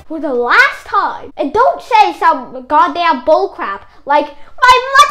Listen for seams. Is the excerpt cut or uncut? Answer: cut